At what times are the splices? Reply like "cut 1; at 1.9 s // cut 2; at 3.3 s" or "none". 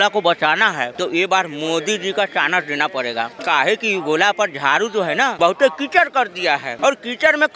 cut 1; at 0.9 s // cut 2; at 3.4 s // cut 3; at 5.3 s // cut 4; at 6.7 s